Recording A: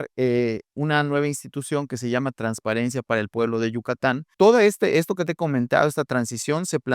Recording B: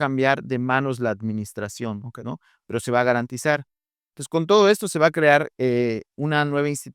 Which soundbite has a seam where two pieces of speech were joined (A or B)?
A